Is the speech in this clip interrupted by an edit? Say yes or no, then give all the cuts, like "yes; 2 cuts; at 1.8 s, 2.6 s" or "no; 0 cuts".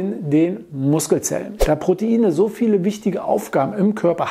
yes; 1 cut; at 1.5 s